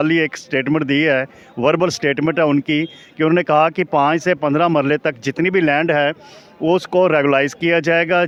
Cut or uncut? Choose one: uncut